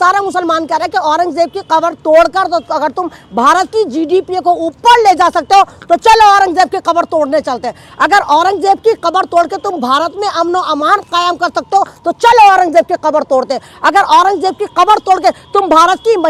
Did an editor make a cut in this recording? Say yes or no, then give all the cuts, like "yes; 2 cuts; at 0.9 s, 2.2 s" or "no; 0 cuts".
no; 0 cuts